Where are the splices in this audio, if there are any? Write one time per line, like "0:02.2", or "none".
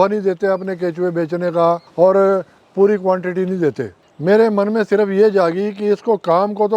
0:01.9
0:03.9